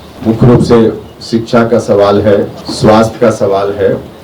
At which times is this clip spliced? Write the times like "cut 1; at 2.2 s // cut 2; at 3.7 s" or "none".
cut 1; at 1.1 s // cut 2; at 2.6 s